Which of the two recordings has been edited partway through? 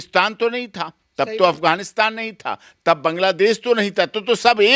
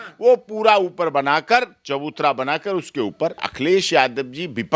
second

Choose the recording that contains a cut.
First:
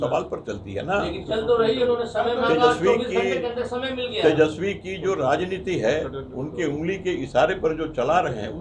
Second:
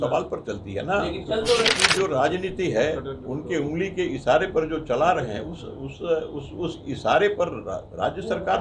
second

